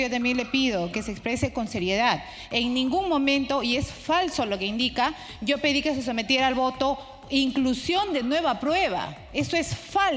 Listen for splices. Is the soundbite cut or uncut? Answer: uncut